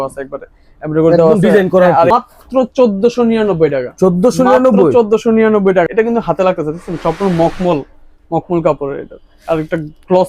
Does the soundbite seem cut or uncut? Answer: cut